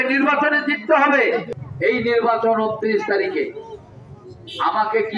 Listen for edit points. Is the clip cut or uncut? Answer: cut